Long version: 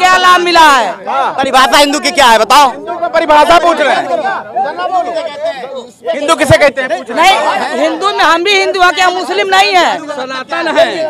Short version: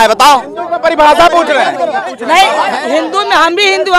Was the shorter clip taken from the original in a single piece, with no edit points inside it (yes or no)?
no